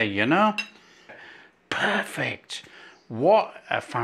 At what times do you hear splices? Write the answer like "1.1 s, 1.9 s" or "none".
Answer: 1.2 s